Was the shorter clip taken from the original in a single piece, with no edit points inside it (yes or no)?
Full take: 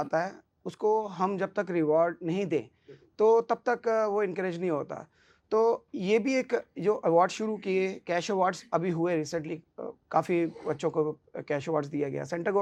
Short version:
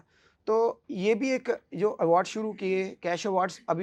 yes